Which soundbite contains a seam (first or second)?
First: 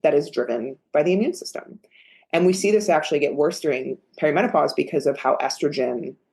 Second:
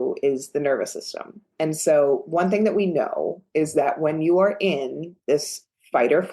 second